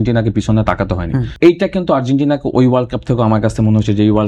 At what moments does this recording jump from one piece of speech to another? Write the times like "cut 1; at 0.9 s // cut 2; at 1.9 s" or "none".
cut 1; at 1.3 s